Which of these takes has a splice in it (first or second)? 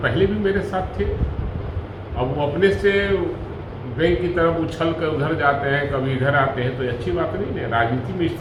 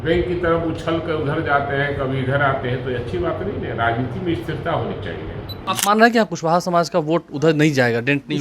second